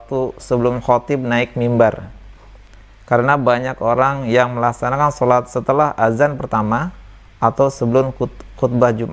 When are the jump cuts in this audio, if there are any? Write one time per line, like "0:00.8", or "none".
none

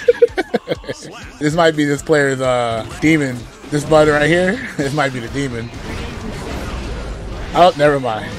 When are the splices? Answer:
none

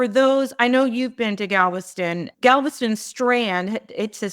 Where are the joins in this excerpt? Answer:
0:02.3

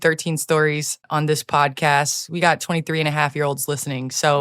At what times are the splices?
0:01.0

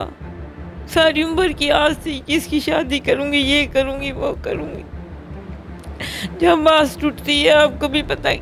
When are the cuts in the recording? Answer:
none

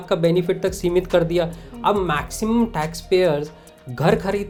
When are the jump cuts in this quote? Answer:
none

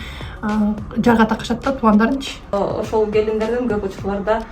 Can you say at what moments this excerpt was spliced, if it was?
0:02.5

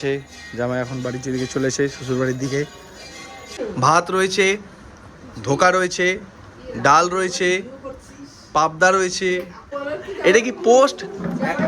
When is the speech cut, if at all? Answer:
0:03.6
0:09.6

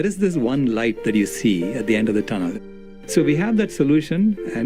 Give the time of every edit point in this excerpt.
0:02.5

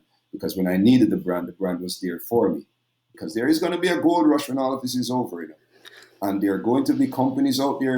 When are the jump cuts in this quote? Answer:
0:03.1

